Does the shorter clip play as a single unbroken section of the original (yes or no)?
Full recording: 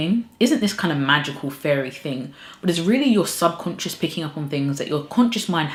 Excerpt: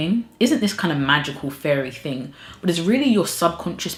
yes